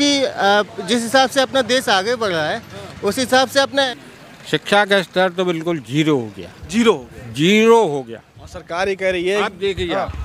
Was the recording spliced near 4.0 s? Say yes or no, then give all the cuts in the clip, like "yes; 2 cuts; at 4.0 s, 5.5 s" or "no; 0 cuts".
yes; 1 cut; at 4.0 s